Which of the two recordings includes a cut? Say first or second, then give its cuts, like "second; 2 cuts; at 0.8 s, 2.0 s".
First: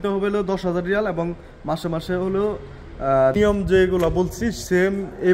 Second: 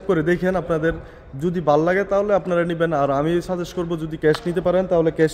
first; 1 cut; at 3.3 s